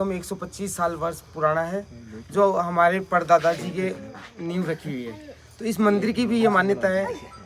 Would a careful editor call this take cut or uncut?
uncut